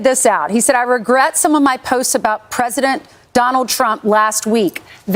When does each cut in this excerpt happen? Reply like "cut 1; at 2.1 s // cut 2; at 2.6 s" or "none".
none